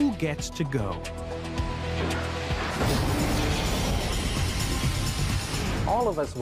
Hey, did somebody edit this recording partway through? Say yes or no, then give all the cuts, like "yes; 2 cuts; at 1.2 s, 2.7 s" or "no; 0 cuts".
yes; 1 cut; at 1.9 s